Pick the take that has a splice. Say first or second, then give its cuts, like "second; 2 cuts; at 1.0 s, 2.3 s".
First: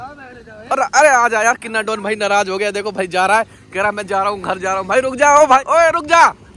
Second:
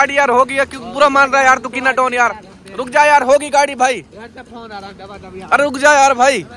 first; 1 cut; at 5.6 s